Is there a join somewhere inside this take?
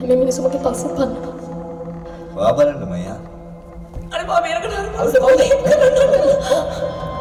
no; 0 cuts

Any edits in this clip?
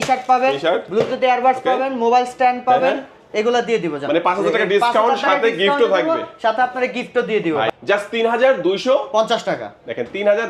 yes; 1 cut; at 7.7 s

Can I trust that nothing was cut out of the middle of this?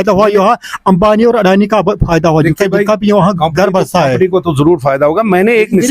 yes; 0 cuts

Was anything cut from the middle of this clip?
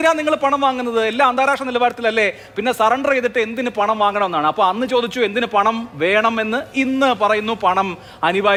no; 0 cuts

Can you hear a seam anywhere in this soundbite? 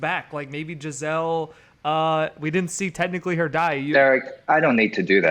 yes; 1 cut; at 3.9 s

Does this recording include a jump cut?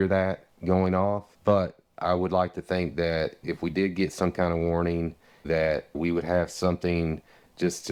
no; 0 cuts

